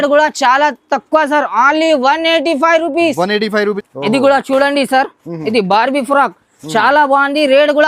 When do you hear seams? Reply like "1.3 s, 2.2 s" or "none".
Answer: 3.8 s